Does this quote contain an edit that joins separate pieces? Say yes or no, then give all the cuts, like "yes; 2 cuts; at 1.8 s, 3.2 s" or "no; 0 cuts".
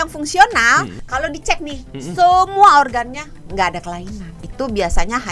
yes; 2 cuts; at 1.0 s, 4.4 s